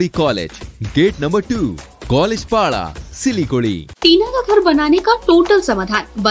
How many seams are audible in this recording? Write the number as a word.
one